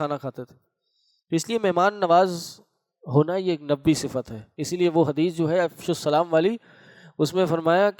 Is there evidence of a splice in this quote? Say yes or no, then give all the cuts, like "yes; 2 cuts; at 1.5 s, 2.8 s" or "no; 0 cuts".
no; 0 cuts